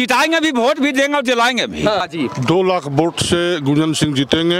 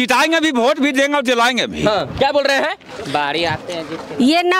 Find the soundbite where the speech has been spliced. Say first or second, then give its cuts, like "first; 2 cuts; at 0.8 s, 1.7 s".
first; 1 cut; at 2.1 s